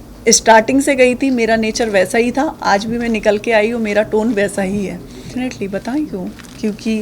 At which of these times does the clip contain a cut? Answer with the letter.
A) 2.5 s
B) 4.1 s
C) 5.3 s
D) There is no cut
C